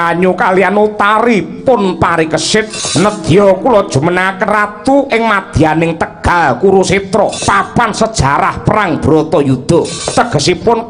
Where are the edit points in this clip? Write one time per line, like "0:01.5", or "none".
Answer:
0:02.8
0:07.4
0:10.0